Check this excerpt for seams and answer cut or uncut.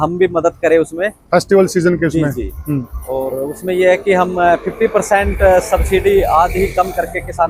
uncut